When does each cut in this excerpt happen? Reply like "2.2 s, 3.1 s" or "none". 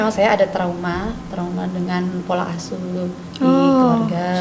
none